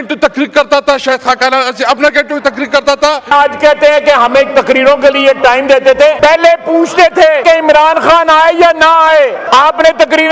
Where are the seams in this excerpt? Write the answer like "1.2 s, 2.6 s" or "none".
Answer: 3.3 s, 6.2 s, 7.4 s, 9.4 s